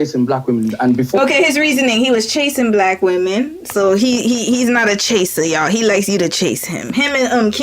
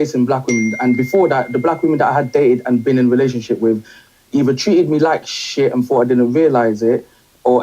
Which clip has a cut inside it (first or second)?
second